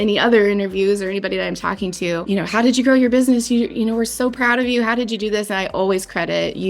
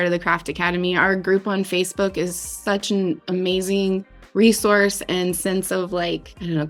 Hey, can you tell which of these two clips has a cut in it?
first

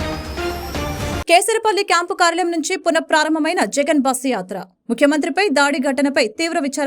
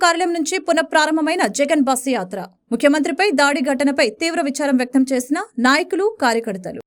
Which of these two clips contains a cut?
first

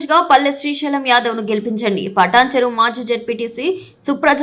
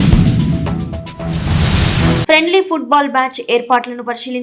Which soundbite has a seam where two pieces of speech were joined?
second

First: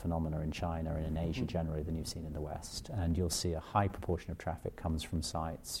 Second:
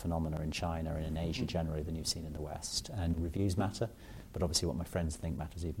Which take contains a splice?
second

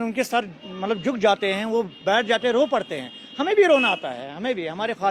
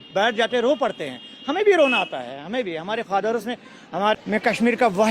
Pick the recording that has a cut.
second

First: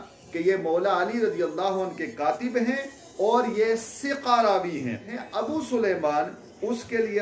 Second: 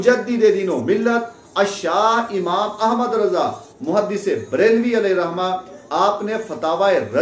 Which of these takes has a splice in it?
first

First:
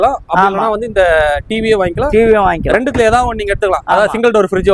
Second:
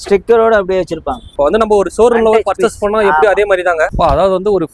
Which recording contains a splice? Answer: second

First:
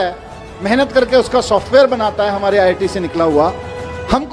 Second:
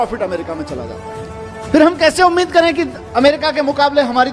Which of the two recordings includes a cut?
second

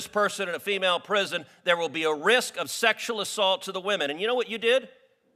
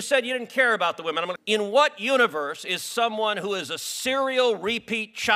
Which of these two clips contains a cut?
second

